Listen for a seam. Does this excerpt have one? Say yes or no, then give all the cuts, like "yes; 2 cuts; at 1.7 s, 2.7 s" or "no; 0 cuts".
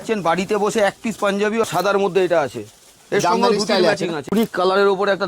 yes; 2 cuts; at 1.7 s, 4.2 s